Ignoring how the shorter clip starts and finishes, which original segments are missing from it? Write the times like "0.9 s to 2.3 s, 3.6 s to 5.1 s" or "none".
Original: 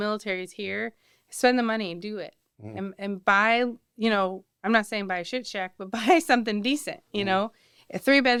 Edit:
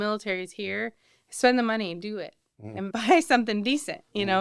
2.9 s to 5.9 s